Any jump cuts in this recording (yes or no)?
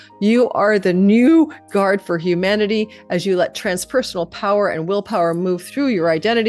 no